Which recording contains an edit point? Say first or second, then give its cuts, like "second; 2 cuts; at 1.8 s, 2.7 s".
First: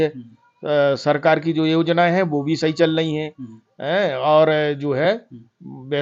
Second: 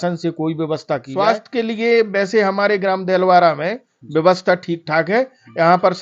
second; 1 cut; at 1.1 s